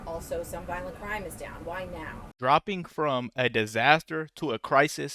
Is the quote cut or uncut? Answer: cut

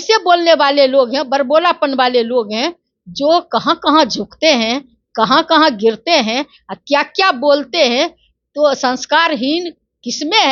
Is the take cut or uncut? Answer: uncut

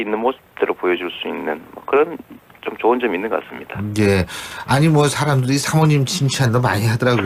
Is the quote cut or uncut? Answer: uncut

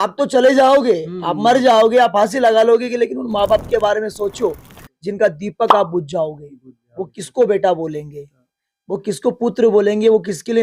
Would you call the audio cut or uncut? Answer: uncut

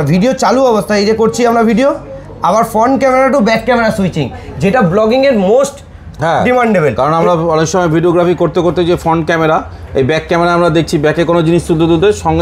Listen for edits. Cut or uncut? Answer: uncut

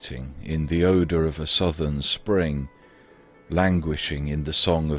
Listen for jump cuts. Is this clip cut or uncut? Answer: cut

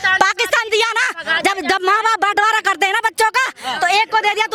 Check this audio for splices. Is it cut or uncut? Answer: uncut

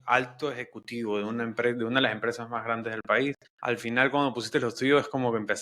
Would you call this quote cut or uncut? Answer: cut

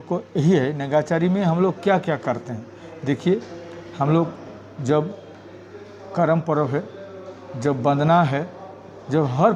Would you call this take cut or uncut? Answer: uncut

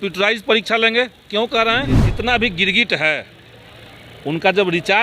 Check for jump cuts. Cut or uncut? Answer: cut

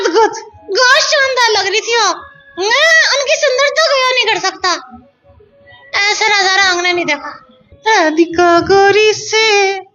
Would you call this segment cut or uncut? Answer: cut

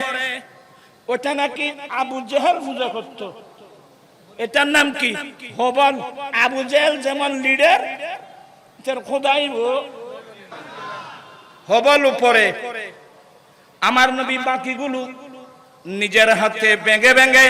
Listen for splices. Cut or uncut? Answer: cut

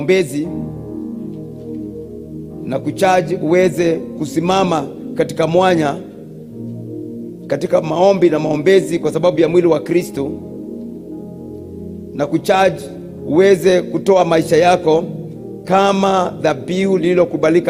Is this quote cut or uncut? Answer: uncut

